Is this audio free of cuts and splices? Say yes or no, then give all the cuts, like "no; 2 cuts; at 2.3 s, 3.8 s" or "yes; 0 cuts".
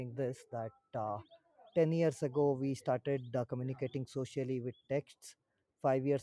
yes; 0 cuts